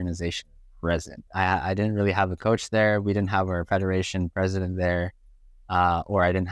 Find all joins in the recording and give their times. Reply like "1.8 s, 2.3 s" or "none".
1.3 s